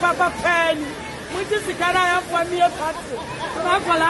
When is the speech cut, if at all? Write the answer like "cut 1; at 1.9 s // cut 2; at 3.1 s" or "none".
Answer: none